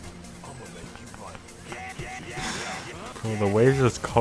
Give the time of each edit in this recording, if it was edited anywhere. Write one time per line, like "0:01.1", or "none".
0:03.1